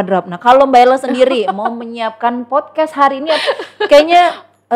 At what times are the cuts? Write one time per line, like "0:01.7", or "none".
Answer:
none